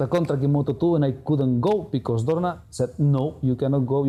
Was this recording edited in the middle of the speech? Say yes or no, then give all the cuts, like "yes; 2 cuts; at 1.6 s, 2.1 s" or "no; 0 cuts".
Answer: no; 0 cuts